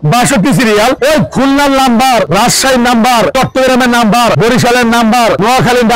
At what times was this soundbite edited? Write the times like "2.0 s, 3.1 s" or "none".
1.0 s